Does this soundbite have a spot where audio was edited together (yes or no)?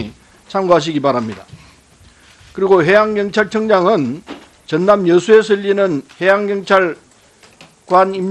yes